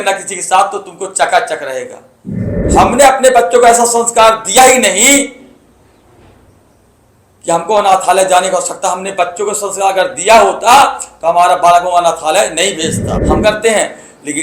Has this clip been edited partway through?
yes; 2 cuts; at 2.3 s, 13.1 s

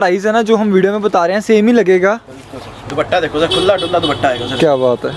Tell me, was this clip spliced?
no; 0 cuts

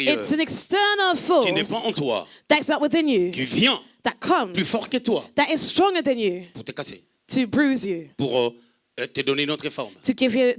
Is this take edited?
no; 0 cuts

